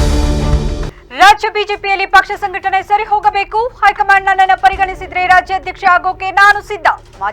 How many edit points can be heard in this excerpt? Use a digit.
1